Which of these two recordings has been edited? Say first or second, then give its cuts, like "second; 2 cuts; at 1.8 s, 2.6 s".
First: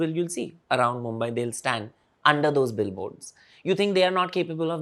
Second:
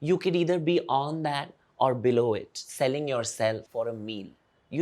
second; 1 cut; at 3.7 s